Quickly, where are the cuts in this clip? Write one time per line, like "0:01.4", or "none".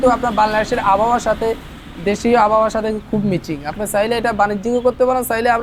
none